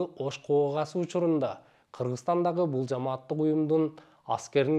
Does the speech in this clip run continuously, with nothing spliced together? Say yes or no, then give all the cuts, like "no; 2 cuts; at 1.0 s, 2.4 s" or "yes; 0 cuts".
yes; 0 cuts